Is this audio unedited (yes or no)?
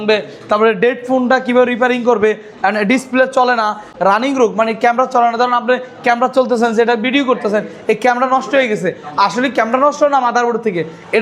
yes